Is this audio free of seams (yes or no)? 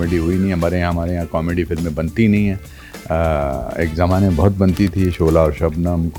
yes